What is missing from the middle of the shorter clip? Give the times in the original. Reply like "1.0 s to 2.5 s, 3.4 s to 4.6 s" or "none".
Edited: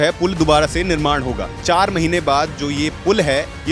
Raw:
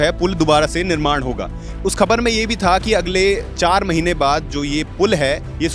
1.5 s to 3.5 s